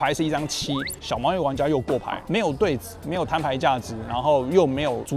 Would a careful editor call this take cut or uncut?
cut